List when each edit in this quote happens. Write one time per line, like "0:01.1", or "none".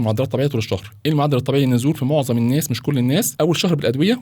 0:03.3